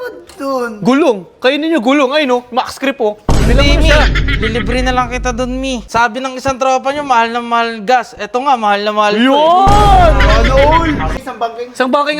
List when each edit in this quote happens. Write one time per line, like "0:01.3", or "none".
0:05.9
0:11.1